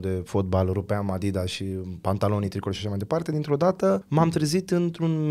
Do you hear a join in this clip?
yes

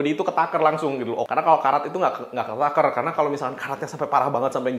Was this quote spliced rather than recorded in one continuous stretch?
yes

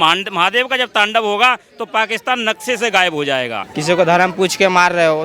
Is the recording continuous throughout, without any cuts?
no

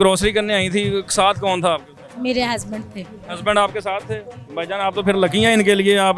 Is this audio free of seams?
yes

